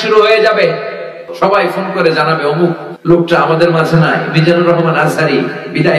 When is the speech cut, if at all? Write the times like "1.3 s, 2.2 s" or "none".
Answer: 1.2 s, 2.9 s